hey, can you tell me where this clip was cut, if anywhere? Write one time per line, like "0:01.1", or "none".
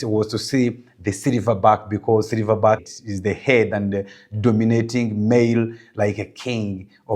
none